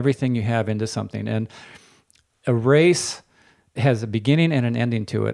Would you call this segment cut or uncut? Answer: cut